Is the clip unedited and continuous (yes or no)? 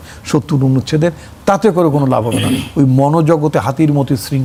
yes